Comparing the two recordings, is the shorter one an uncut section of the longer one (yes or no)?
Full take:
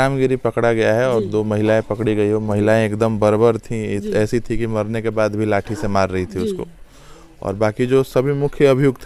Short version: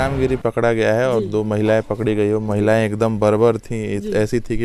yes